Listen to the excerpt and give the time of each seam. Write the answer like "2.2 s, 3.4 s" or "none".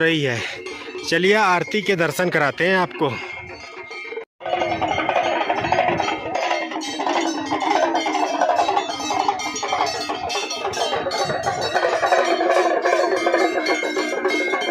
none